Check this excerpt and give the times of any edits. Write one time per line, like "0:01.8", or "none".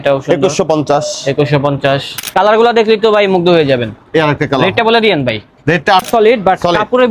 0:02.2
0:06.1